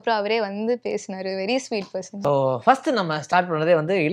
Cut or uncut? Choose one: cut